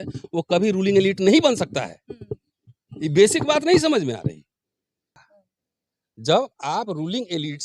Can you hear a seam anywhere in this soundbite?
yes; 1 cut; at 5.2 s

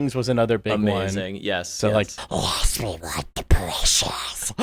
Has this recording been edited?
no; 0 cuts

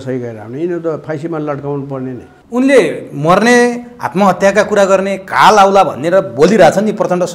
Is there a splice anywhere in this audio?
yes; 1 cut; at 2.3 s

